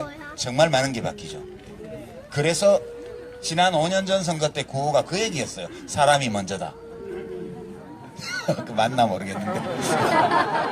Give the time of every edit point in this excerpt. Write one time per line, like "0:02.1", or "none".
0:07.3

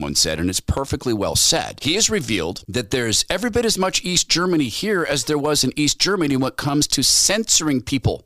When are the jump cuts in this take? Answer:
0:01.8

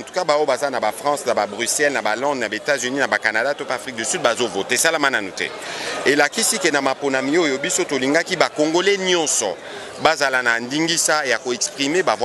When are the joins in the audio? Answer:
none

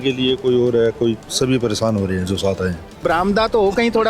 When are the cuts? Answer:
0:03.0

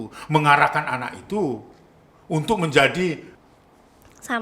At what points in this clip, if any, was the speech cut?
0:03.3

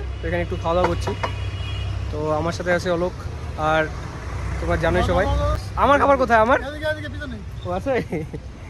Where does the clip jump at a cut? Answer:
none

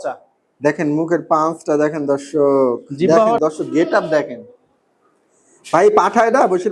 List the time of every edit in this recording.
0:03.4

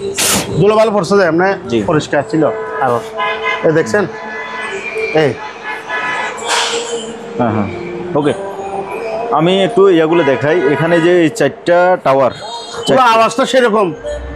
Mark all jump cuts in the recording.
none

